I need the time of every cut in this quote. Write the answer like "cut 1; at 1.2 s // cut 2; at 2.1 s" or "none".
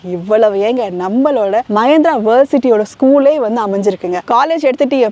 cut 1; at 4.2 s